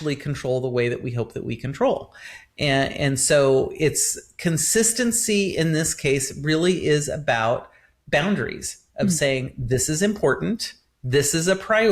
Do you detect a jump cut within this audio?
no; 0 cuts

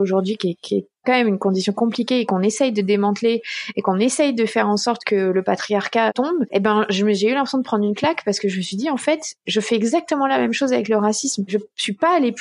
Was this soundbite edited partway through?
yes; 2 cuts; at 6.1 s, 11.5 s

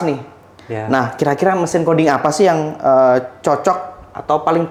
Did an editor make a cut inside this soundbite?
no; 0 cuts

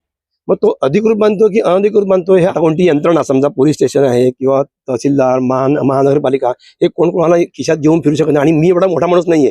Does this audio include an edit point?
yes; 1 cut; at 2.5 s

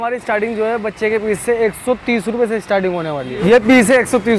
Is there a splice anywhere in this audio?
yes; 1 cut; at 3.4 s

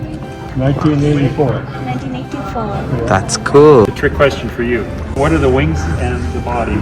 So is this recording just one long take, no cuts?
no; 2 cuts; at 3.9 s, 5.1 s

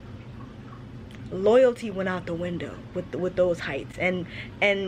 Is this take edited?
no; 0 cuts

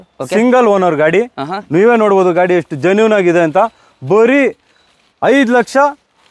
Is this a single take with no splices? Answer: yes; 0 cuts

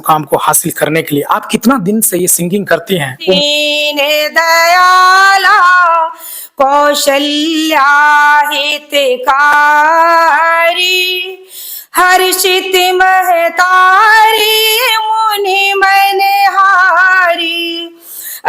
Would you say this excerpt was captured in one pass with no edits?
no; 1 cut; at 3.4 s

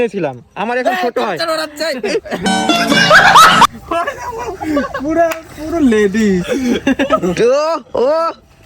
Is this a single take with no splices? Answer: no; 3 cuts; at 2.5 s, 3.7 s, 4.9 s

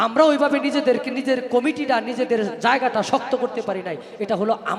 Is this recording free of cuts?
yes; 0 cuts

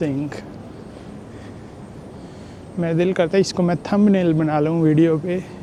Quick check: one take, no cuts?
yes; 0 cuts

